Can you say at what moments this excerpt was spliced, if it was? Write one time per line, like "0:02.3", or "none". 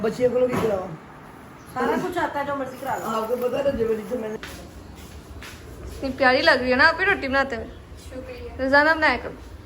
0:04.4